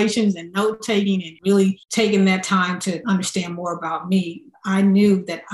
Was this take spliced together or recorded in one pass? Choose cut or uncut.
cut